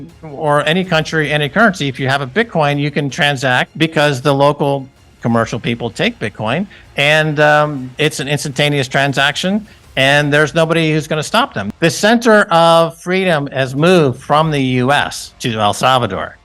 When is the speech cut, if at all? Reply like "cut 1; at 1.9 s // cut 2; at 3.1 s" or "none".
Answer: cut 1; at 3.7 s